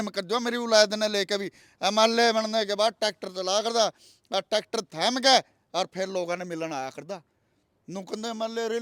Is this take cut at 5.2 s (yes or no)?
no